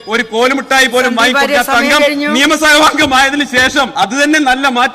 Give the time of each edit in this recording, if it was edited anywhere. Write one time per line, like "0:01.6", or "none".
0:03.9